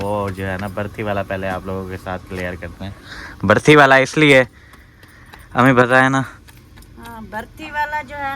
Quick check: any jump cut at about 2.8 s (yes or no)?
no